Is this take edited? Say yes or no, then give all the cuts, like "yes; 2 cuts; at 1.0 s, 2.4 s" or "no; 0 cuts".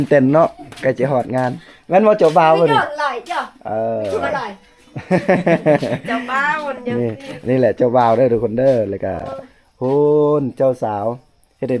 no; 0 cuts